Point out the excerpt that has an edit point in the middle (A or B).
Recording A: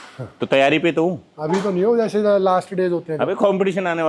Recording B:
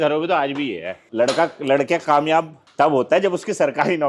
B